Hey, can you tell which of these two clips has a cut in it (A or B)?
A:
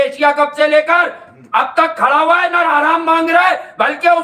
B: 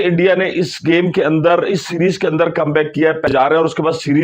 B